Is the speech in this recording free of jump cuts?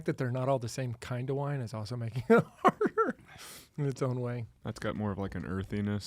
no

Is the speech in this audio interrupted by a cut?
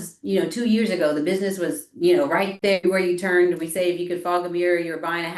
yes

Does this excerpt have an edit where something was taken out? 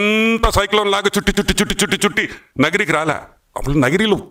no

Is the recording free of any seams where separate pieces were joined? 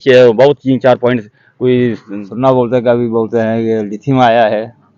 no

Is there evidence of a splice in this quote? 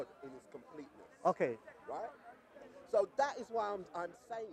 no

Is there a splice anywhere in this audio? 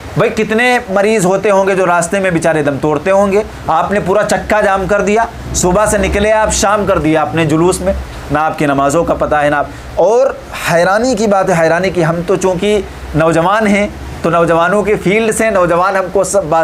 no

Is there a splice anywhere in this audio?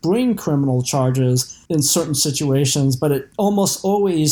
yes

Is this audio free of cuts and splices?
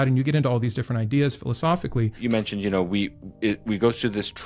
no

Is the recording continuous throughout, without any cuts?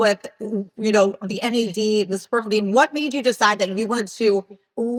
yes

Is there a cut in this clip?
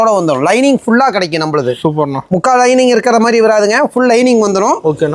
no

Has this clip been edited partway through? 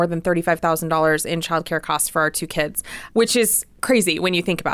no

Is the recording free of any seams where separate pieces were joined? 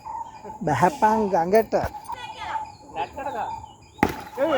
no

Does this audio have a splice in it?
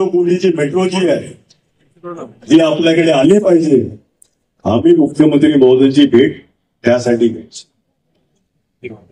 no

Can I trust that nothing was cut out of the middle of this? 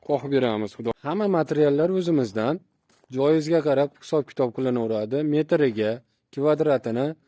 no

